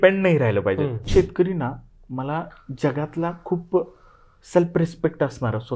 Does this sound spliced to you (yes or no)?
yes